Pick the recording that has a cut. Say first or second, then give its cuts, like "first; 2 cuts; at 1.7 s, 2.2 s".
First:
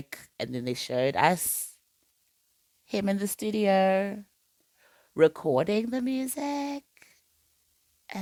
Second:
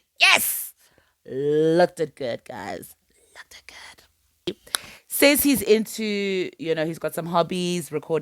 second; 1 cut; at 4.5 s